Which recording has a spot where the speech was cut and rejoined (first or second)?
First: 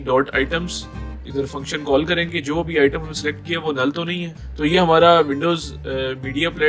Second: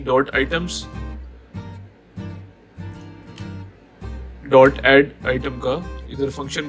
first